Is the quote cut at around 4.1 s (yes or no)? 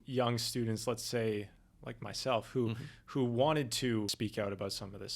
yes